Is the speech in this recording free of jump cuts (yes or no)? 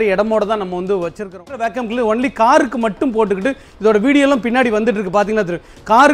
no